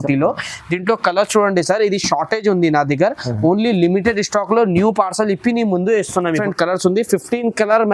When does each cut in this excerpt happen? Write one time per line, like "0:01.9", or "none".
0:06.4